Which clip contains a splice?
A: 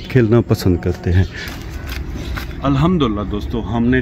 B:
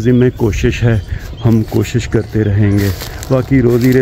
A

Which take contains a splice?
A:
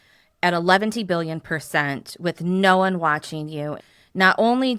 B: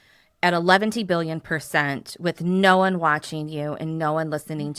A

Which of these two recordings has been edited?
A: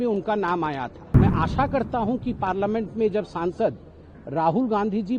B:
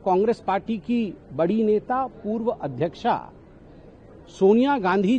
A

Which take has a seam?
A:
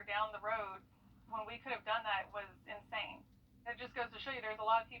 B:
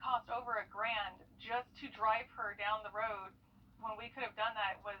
A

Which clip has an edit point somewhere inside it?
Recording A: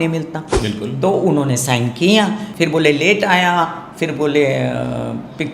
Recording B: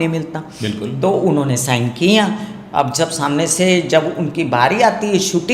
A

